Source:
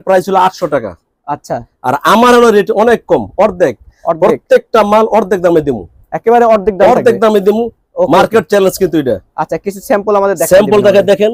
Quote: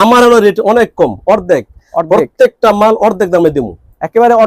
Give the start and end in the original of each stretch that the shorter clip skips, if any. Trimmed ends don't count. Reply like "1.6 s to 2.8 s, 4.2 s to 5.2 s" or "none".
none